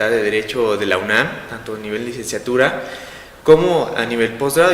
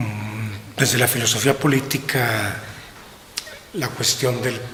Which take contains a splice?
first; 1 cut; at 1.5 s

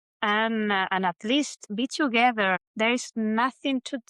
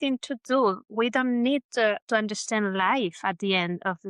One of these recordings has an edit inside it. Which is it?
first; 2 cuts; at 1.6 s, 2.7 s

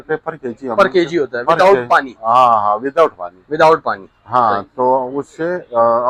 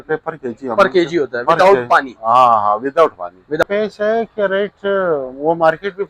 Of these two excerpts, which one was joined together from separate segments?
second; 1 cut; at 3.6 s

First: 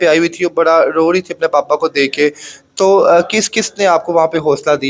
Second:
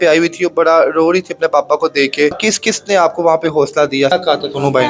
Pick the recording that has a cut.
second; 2 cuts; at 2.5 s, 4.1 s

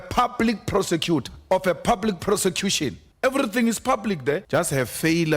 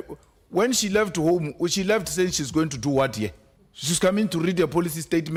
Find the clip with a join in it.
first; 3 cuts; at 1.3 s, 3.0 s, 4.4 s

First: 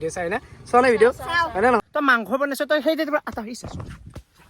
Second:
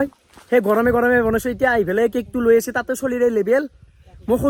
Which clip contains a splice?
first; 1 cut; at 1.8 s

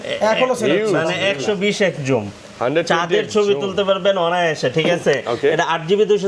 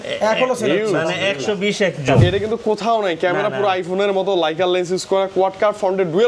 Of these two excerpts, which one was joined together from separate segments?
second; 1 cut; at 2.1 s

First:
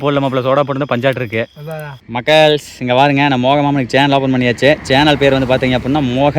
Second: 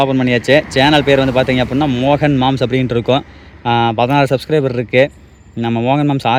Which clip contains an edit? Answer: first; 1 cut; at 2.2 s

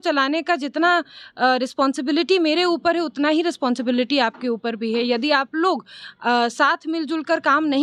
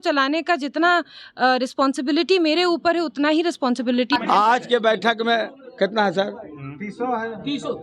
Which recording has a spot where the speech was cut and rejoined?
second; 1 cut; at 4.1 s

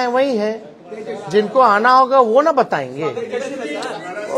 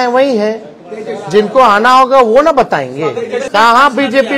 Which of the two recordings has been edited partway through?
second; 1 cut; at 3.5 s

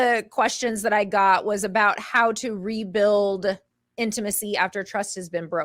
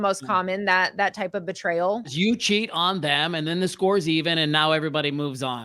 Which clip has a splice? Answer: second; 1 cut; at 2.1 s

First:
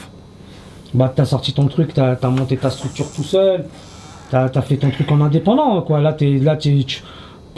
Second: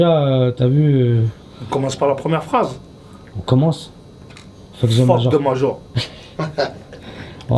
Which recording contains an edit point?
second; 1 cut; at 3.8 s

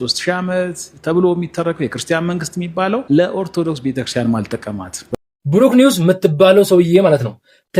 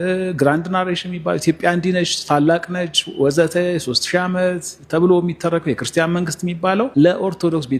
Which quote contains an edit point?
first; 1 cut; at 5.1 s

